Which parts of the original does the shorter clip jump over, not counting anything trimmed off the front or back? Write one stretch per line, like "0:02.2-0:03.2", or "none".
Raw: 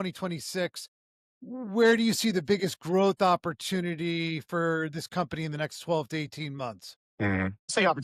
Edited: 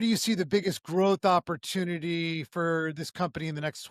none